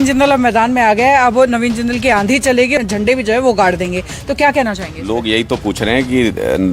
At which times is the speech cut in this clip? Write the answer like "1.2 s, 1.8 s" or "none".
2.7 s

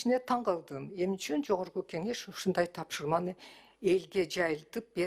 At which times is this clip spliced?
none

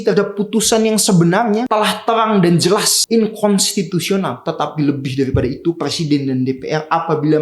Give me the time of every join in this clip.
1.7 s, 3.0 s, 4.4 s

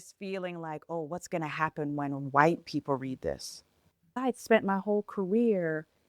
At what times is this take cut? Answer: 4.1 s

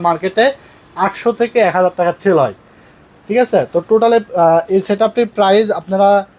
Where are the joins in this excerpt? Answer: none

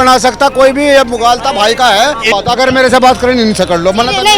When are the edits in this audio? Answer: 2.3 s

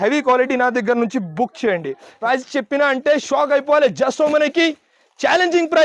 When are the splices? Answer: 2.1 s

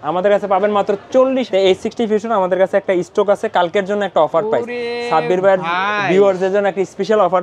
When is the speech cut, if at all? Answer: 1.5 s

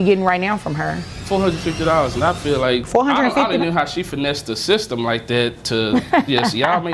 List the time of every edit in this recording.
1.1 s, 2.8 s

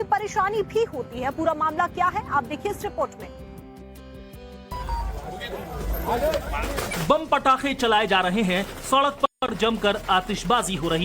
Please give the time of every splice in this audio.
8.7 s

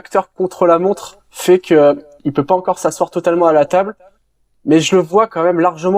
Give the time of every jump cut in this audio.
none

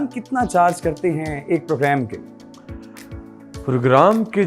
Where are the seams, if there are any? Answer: none

